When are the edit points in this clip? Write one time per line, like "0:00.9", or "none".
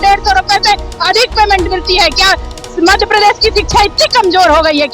none